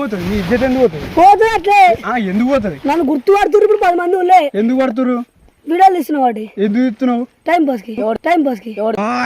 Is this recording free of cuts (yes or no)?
no